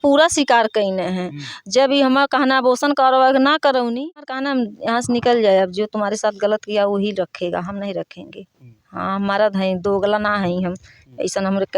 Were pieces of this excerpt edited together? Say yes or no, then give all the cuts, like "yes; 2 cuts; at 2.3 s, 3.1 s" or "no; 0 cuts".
yes; 1 cut; at 4.1 s